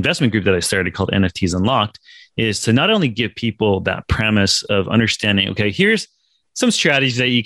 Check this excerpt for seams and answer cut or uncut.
uncut